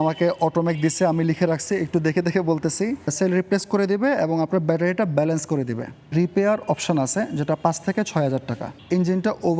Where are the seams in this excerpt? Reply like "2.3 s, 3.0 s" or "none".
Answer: 3.1 s, 6.1 s, 8.7 s